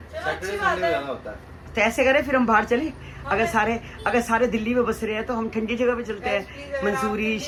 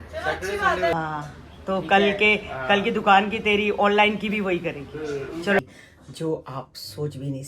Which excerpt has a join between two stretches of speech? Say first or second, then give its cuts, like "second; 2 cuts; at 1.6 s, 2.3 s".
second; 2 cuts; at 0.9 s, 5.6 s